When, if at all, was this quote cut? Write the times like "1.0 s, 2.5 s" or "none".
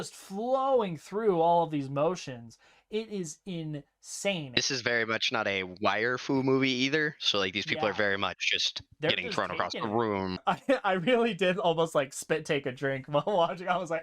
4.6 s, 10.4 s